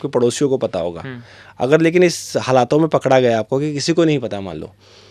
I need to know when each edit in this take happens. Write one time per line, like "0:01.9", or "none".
none